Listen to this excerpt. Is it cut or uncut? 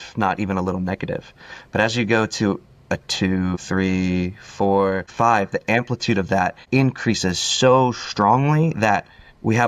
cut